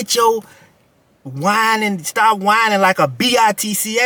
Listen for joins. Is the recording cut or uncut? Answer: uncut